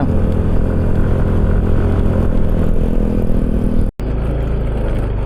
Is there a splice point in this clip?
yes; 1 cut; at 4.0 s

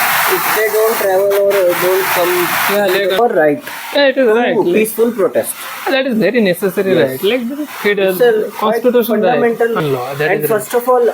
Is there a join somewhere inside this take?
yes; 2 cuts; at 3.2 s, 9.8 s

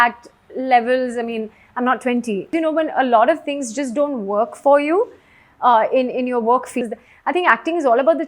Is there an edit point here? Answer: yes; 2 cuts; at 2.5 s, 6.8 s

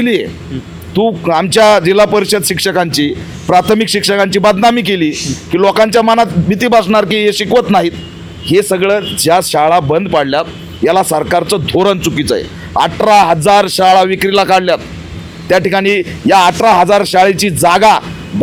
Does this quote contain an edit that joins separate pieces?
no; 0 cuts

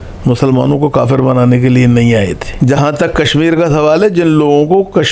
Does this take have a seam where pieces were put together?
yes; 1 cut; at 2.4 s

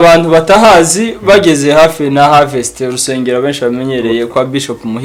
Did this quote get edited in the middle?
no; 0 cuts

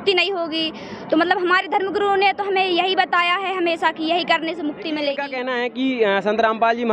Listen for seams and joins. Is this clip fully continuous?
no; 1 cut; at 5.3 s

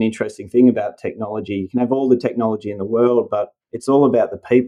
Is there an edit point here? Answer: no; 0 cuts

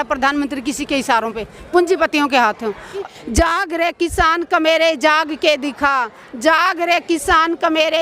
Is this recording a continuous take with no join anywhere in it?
no; 1 cut; at 3.0 s

